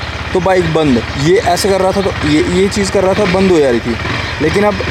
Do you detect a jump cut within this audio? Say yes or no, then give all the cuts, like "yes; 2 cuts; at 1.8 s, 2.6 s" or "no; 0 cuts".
no; 0 cuts